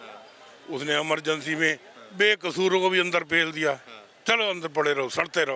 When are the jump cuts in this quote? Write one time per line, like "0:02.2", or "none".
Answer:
none